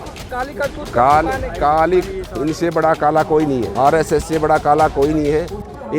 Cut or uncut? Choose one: cut